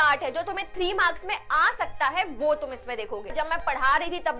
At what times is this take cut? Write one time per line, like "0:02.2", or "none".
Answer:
0:03.3